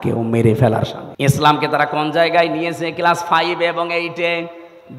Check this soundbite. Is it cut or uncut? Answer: cut